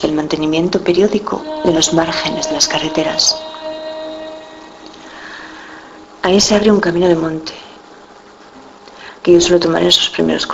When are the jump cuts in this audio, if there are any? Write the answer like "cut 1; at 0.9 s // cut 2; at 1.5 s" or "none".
cut 1; at 4.5 s